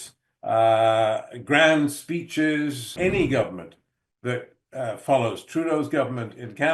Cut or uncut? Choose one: cut